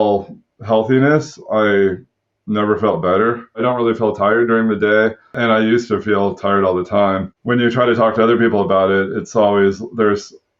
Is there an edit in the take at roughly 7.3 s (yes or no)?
yes